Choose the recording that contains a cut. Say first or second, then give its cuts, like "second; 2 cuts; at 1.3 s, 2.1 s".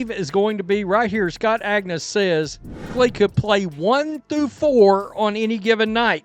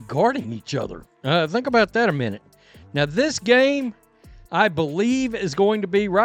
first; 1 cut; at 2.7 s